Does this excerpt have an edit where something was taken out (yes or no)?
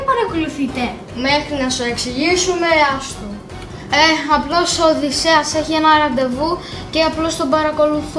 no